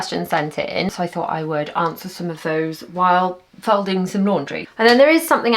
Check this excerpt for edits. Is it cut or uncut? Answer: cut